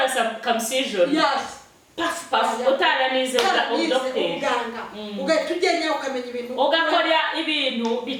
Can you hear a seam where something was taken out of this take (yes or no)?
no